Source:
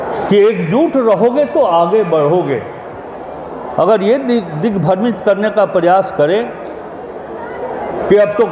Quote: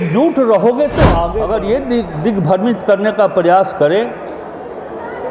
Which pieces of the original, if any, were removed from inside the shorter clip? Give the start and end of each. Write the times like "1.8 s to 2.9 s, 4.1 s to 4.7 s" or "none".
1.9 s to 3.7 s